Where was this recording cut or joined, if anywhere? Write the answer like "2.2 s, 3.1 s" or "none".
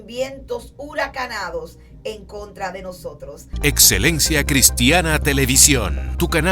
3.4 s